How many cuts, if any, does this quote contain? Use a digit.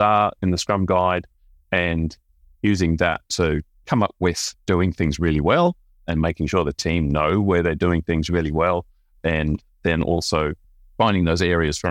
1